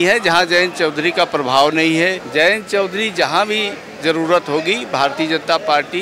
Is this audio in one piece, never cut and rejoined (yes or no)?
no